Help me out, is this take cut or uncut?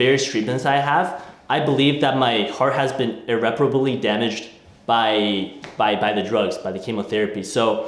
uncut